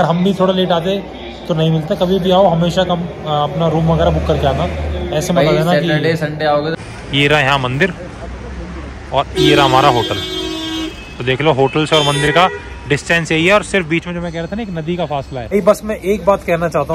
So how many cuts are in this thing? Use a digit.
2